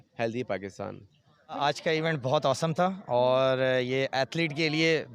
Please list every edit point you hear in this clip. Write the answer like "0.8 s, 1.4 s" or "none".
1.5 s